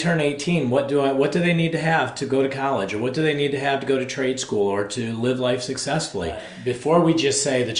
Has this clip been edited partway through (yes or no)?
yes